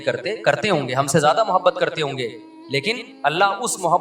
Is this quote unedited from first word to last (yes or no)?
no